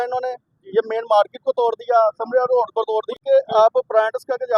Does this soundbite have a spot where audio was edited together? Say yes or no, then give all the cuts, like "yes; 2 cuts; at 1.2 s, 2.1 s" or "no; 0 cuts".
no; 0 cuts